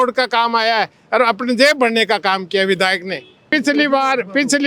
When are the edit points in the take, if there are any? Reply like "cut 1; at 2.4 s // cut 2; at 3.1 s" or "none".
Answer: cut 1; at 3.5 s